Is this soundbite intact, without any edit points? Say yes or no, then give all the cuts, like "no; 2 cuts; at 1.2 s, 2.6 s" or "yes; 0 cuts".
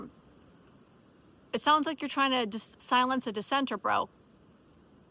no; 1 cut; at 2.8 s